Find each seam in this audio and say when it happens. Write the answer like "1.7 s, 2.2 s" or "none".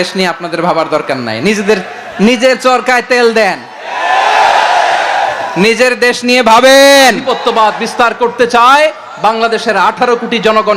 7.2 s